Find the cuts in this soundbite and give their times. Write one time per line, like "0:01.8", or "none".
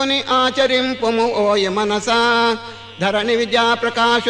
0:01.4